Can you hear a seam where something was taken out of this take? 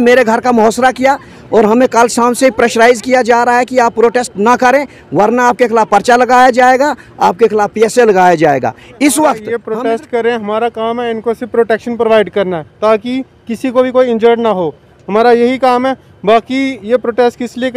yes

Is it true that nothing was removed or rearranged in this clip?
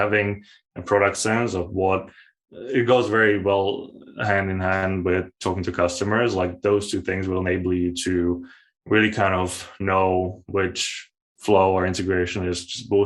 yes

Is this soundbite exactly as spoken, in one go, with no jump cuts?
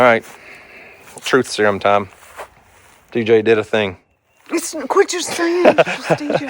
yes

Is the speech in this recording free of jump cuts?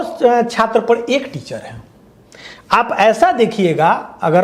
yes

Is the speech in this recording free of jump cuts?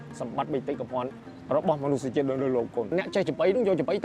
no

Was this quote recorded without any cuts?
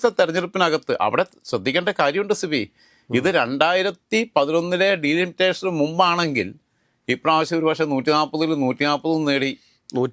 yes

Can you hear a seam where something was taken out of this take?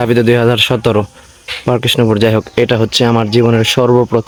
no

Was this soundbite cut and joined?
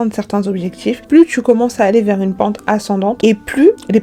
no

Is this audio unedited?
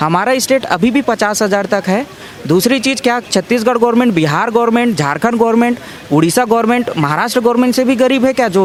yes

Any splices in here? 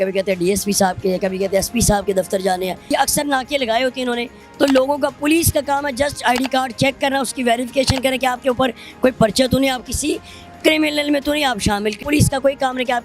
yes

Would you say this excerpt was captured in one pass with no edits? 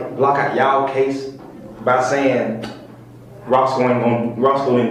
yes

